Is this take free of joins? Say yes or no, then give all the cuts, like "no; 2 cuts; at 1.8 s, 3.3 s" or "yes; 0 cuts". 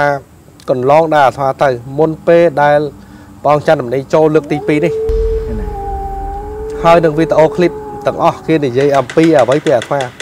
yes; 0 cuts